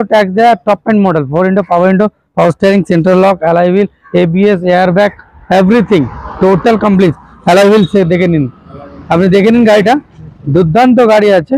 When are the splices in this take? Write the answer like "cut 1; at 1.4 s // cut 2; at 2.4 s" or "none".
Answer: none

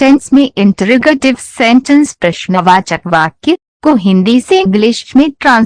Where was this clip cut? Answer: cut 1; at 1.2 s // cut 2; at 3.0 s

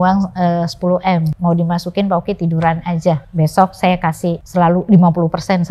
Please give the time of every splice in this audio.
cut 1; at 1.3 s // cut 2; at 3.3 s // cut 3; at 4.4 s

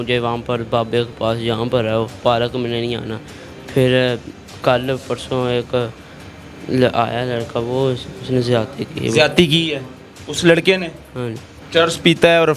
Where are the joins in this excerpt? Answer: cut 1; at 11.5 s

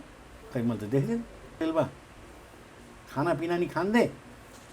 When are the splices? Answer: cut 1; at 1.6 s

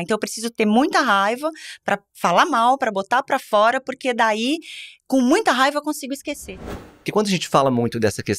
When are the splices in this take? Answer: cut 1; at 6.7 s

